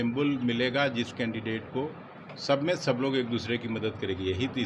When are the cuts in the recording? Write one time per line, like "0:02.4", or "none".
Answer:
none